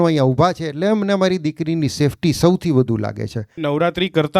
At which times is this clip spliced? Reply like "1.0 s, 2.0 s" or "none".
3.5 s